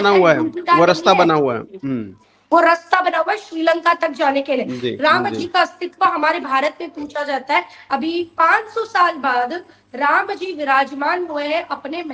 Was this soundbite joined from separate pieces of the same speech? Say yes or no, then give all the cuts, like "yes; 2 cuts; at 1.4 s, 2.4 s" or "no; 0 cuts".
yes; 1 cut; at 7.8 s